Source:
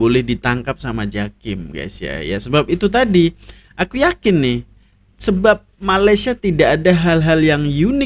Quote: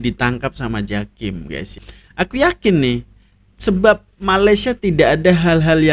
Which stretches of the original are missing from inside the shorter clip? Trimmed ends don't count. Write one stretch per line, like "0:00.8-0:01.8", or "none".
0:02.1-0:03.5